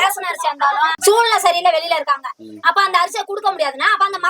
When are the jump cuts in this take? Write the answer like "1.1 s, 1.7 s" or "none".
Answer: 1.0 s